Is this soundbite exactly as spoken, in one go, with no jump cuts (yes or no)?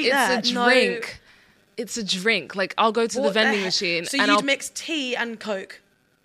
yes